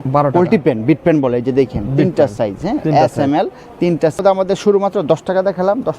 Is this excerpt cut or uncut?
cut